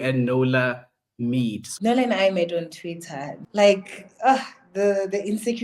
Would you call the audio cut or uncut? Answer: cut